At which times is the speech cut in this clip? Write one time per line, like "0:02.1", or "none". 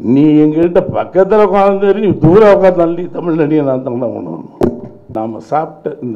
0:04.9